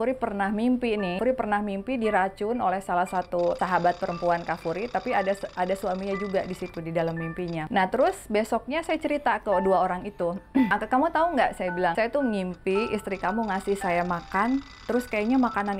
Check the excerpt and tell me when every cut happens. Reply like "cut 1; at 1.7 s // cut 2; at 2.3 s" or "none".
cut 1; at 1.2 s // cut 2; at 3.6 s // cut 3; at 7.6 s // cut 4; at 10.7 s // cut 5; at 11.9 s